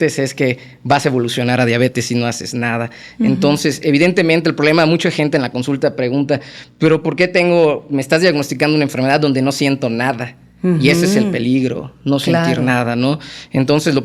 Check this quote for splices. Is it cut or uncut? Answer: uncut